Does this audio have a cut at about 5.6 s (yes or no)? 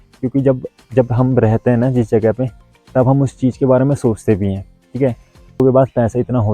yes